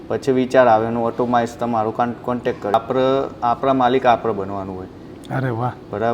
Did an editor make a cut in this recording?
yes; 1 cut; at 2.7 s

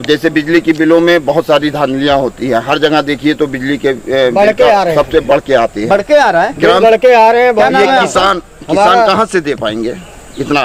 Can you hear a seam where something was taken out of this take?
no; 0 cuts

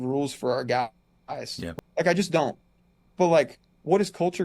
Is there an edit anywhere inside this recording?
yes; 1 cut; at 1.7 s

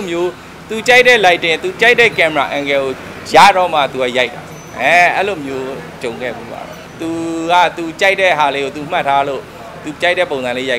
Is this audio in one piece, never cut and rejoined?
no; 1 cut; at 6.8 s

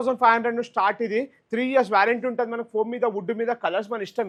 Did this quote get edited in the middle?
no; 0 cuts

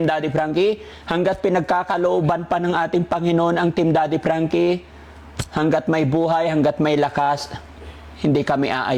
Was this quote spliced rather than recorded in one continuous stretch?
no; 0 cuts

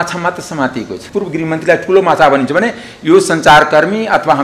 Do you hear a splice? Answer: yes; 1 cut; at 1.0 s

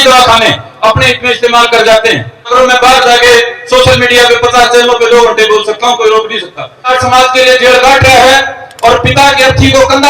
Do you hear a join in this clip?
yes; 2 cuts; at 2.5 s, 6.9 s

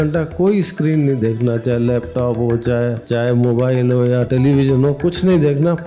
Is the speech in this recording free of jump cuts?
no; 2 cuts; at 3.0 s, 4.3 s

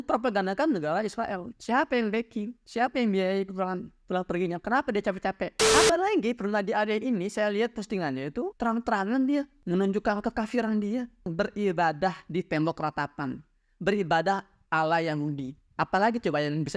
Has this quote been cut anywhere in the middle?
yes; 3 cuts; at 5.6 s, 8.5 s, 11.3 s

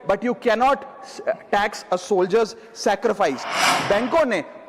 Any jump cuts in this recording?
yes; 1 cut; at 3.7 s

